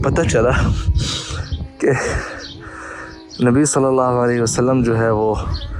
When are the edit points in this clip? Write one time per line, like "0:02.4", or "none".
none